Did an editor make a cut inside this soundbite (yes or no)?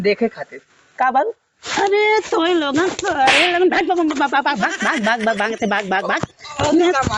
no